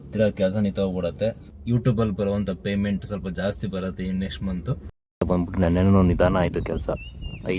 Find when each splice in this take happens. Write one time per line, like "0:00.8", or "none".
0:01.6
0:05.2